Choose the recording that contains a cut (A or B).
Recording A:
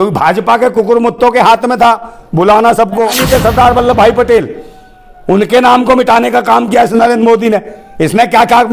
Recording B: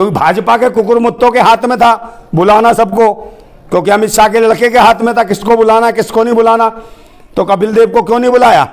A